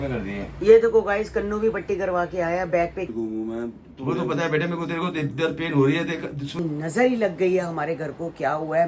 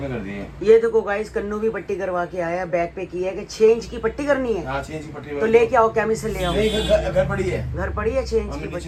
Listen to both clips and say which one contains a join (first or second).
first